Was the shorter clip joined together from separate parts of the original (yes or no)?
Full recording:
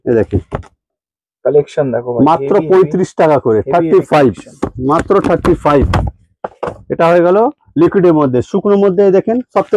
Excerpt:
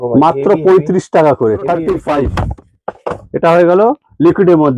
yes